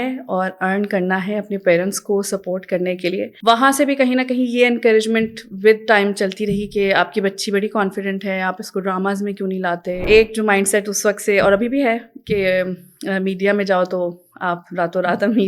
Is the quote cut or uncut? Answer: cut